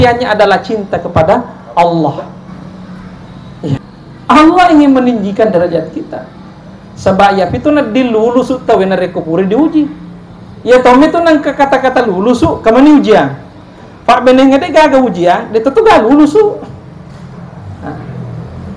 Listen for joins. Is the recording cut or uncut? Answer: cut